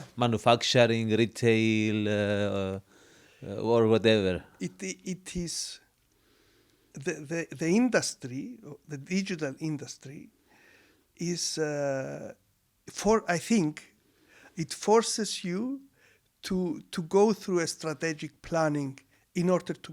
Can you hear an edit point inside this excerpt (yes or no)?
no